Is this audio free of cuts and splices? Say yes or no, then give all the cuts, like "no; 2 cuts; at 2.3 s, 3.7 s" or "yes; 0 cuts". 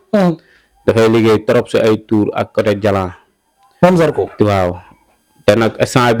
yes; 0 cuts